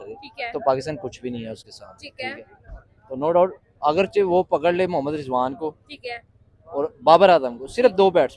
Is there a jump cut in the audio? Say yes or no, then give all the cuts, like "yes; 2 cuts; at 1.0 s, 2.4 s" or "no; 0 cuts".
no; 0 cuts